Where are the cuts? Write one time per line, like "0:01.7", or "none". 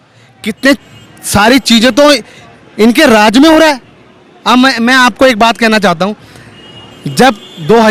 none